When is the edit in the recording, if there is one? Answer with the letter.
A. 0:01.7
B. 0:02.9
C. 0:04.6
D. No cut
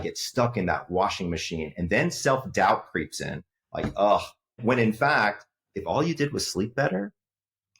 C